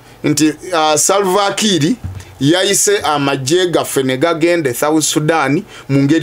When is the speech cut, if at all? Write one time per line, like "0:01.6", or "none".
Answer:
none